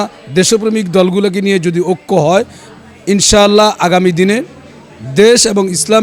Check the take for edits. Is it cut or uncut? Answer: uncut